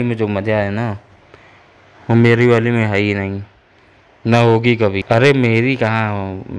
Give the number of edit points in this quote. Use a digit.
2